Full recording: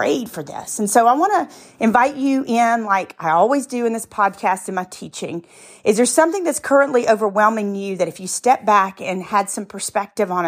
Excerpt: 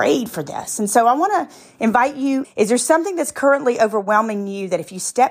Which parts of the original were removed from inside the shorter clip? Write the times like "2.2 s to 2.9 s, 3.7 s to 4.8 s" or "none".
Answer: 2.5 s to 5.7 s